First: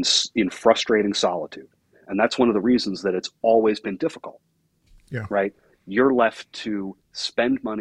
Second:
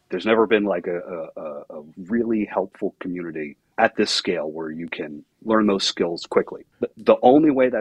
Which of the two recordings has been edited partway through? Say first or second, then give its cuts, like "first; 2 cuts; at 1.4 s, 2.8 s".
second; 3 cuts; at 3.6 s, 5.2 s, 6.6 s